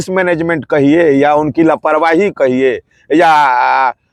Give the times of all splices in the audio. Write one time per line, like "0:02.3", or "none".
none